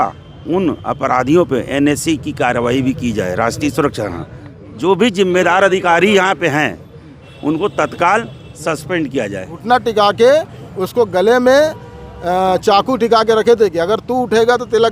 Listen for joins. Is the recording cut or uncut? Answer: cut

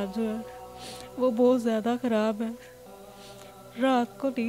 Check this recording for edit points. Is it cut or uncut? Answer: uncut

